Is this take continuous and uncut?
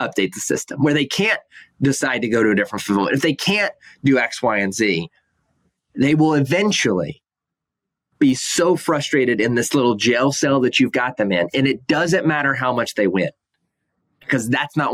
yes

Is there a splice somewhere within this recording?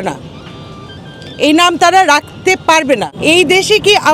yes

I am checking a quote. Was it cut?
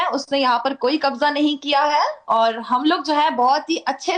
no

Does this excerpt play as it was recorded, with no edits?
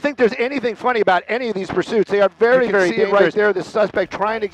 no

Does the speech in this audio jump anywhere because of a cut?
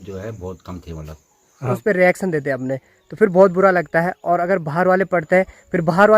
yes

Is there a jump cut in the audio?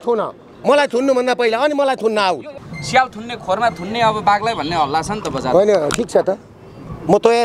yes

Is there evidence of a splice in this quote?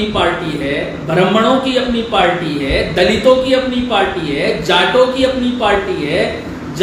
no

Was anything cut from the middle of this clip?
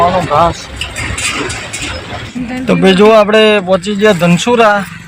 yes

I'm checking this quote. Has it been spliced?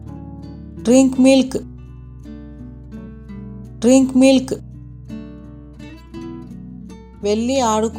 no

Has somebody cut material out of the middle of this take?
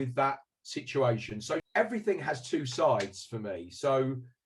yes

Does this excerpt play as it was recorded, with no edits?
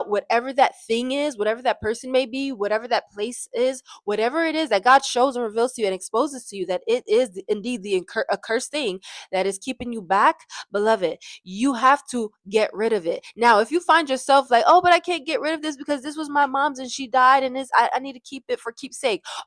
yes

